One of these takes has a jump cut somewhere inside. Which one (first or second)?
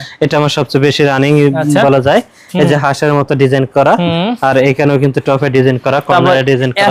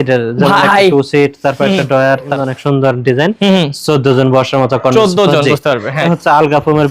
second